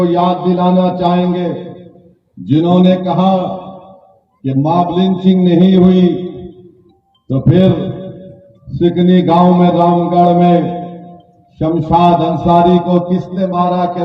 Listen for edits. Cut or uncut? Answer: uncut